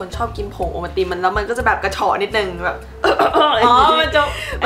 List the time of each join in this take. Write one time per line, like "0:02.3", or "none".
none